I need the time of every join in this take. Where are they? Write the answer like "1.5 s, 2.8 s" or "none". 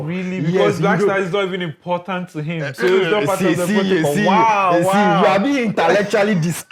none